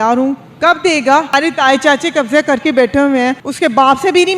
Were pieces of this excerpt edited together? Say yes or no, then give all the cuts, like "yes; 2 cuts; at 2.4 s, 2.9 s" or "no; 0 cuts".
yes; 2 cuts; at 1.3 s, 3.5 s